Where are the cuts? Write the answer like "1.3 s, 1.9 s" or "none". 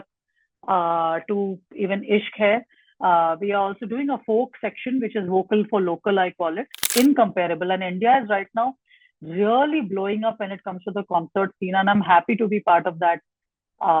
6.8 s